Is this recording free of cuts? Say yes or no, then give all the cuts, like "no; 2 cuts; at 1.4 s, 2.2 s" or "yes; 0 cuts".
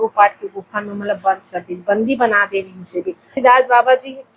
no; 1 cut; at 3.3 s